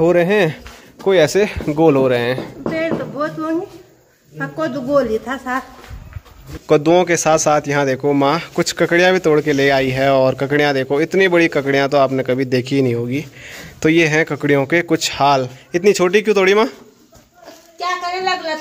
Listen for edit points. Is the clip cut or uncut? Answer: uncut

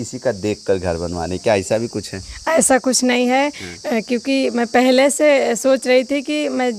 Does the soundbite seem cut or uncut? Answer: uncut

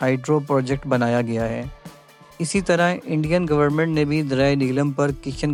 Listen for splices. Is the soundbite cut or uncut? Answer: uncut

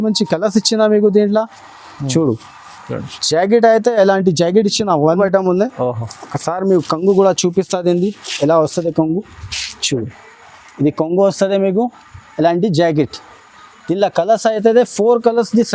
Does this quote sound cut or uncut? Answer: cut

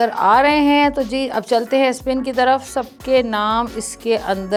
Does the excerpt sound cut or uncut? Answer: uncut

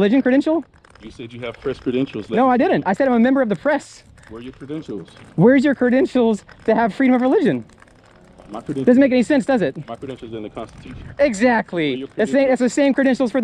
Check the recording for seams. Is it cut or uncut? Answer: uncut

